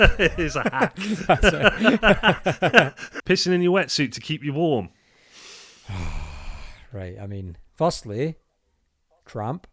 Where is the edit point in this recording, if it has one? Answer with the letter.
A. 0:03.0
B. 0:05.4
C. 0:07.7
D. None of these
A